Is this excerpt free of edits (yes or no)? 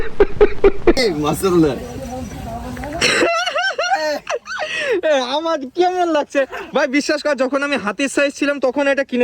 no